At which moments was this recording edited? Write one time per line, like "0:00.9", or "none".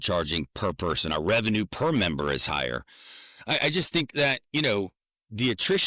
none